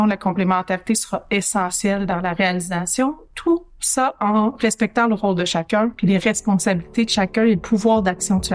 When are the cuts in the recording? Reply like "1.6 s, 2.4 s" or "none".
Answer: none